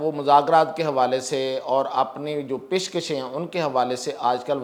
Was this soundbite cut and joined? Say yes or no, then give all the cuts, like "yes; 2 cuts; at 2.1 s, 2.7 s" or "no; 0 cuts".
no; 0 cuts